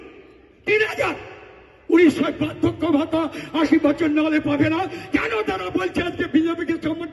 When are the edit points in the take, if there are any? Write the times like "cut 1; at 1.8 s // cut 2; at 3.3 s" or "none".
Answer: none